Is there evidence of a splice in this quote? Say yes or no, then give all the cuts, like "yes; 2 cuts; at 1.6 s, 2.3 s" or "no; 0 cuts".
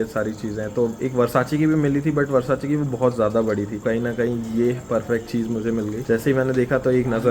yes; 2 cuts; at 3.8 s, 6.0 s